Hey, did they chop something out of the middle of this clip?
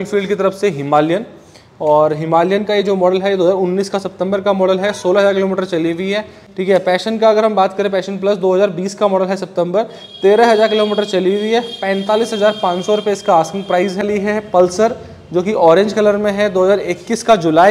yes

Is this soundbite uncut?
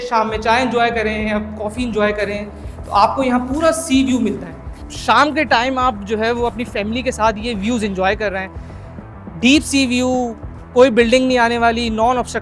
no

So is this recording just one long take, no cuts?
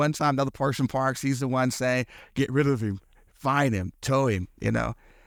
yes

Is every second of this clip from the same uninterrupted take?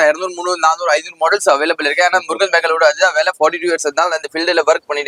yes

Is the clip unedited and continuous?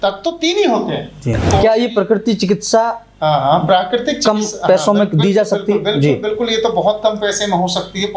no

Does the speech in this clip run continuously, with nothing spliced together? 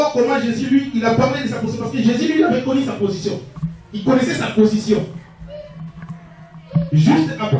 yes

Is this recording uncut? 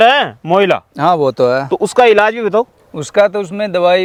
yes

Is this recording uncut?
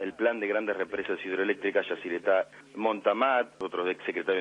no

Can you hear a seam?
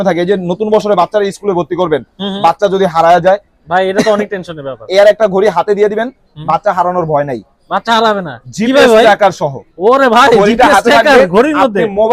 no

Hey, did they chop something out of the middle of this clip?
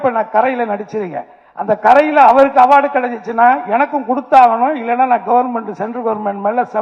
no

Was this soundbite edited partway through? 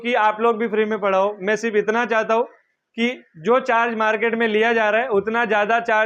no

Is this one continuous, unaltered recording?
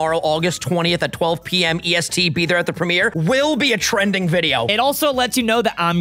no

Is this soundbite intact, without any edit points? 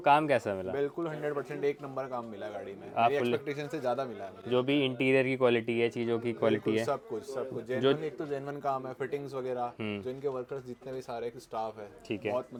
yes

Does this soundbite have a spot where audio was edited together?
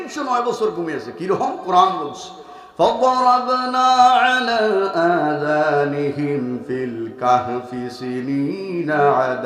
no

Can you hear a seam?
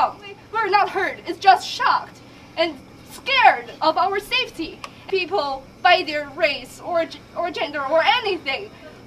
yes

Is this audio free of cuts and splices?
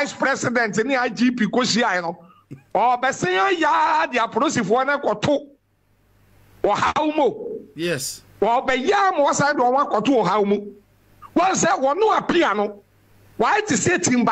yes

